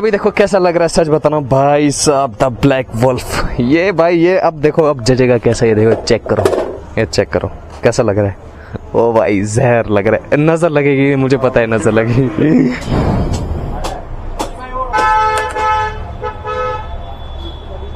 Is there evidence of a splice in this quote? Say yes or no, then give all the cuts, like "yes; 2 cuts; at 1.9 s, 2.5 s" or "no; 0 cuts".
no; 0 cuts